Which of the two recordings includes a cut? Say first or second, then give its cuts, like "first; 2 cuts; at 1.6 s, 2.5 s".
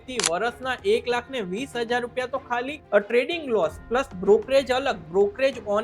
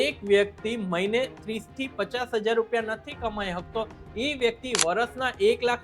first; 1 cut; at 2.8 s